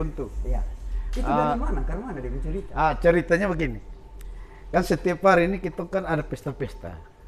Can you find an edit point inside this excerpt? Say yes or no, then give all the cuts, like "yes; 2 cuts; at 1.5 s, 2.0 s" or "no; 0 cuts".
no; 0 cuts